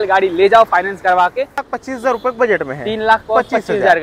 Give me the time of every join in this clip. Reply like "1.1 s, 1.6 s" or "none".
1.7 s